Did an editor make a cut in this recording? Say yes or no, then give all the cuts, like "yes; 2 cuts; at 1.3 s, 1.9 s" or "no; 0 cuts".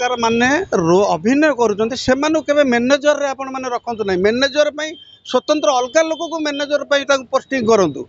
no; 0 cuts